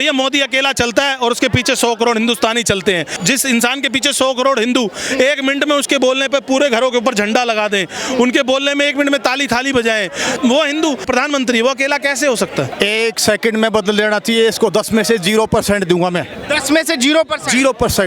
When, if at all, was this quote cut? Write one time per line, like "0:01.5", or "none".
0:03.2
0:10.4
0:11.0
0:12.7

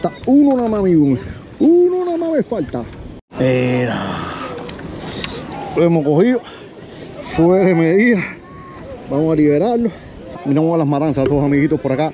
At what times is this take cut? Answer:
0:03.2
0:10.4

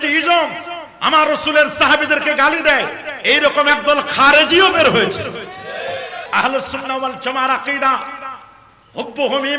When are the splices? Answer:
0:06.2

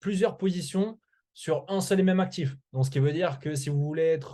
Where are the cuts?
none

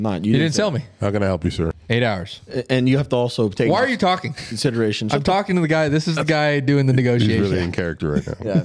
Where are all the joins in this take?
0:01.8

